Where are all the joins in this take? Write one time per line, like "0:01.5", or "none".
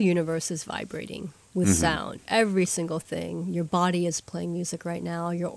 0:02.2